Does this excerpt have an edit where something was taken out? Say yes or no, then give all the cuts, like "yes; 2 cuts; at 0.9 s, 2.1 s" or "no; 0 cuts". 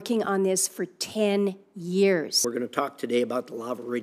no; 0 cuts